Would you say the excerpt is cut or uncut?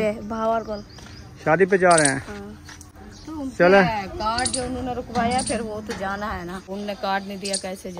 cut